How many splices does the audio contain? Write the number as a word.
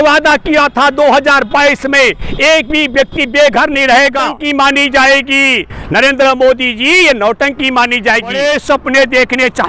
two